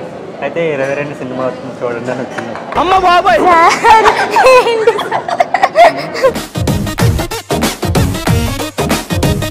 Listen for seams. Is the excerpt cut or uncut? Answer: uncut